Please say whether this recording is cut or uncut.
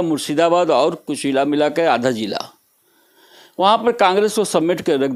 uncut